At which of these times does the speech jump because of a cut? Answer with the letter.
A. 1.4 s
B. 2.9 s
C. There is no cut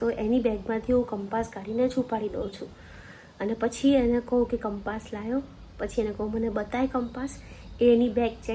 C